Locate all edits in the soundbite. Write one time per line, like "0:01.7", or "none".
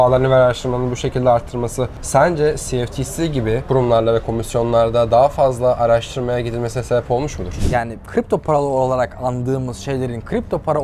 0:01.9
0:03.6
0:07.5